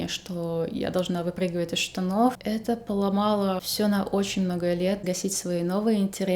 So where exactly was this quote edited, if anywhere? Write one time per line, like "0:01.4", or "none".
0:02.4
0:03.7
0:05.0

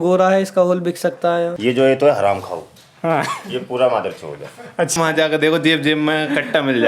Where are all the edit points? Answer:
0:01.6
0:04.9

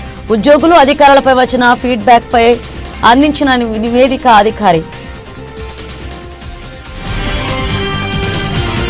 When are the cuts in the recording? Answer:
0:04.9
0:06.3

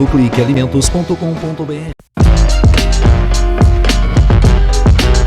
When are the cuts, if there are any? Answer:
0:02.0

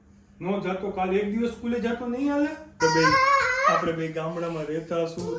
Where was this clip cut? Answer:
0:02.8

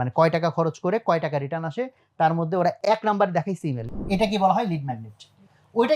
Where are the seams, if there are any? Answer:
0:02.8
0:03.8

